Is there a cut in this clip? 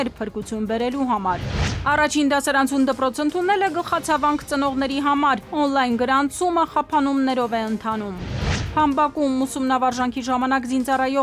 yes; 1 cut; at 1.8 s

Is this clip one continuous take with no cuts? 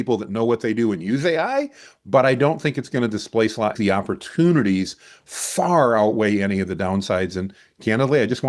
no; 1 cut; at 3.7 s

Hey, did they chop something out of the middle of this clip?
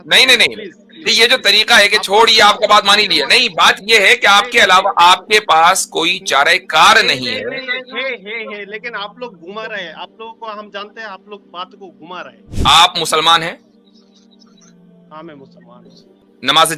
yes; 1 cut; at 12.4 s

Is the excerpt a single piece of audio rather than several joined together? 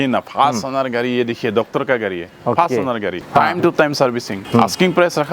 no; 3 cuts; at 2.2 s, 3.2 s, 4.3 s

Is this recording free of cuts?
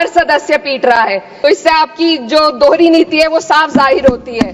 no; 1 cut; at 1.3 s

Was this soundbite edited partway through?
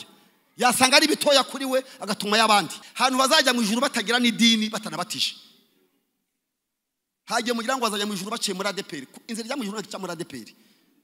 yes; 1 cut; at 2.8 s

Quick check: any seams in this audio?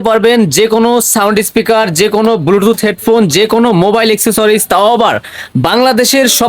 no; 0 cuts

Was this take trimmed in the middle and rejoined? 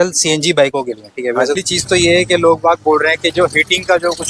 yes; 1 cut; at 1.6 s

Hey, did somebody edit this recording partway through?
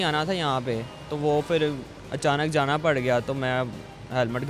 no; 0 cuts

